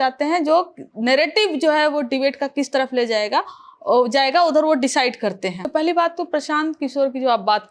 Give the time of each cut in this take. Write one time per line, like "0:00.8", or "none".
0:05.6